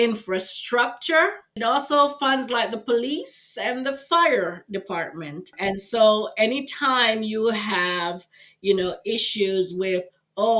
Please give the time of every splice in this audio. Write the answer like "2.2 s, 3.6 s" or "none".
1.6 s, 5.5 s